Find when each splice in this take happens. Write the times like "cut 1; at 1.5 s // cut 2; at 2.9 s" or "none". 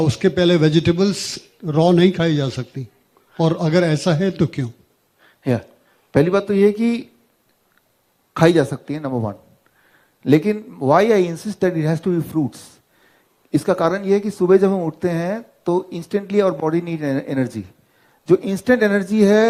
none

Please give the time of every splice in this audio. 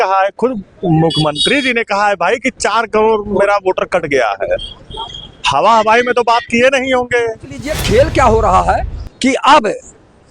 cut 1; at 7.7 s

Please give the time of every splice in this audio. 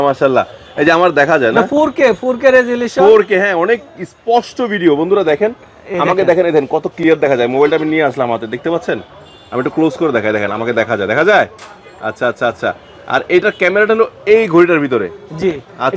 none

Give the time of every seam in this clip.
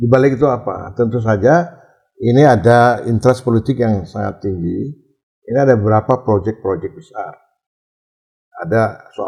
none

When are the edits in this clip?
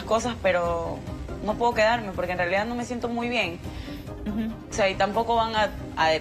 none

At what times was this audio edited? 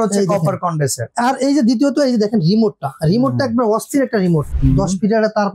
cut 1; at 4.5 s

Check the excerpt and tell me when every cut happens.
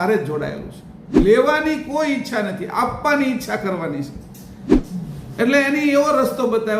cut 1; at 1.1 s // cut 2; at 4.6 s

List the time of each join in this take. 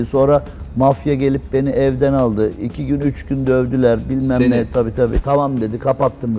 cut 1; at 5.2 s

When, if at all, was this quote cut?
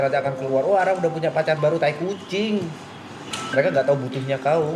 cut 1; at 3.3 s

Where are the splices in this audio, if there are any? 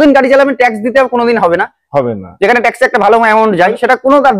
none

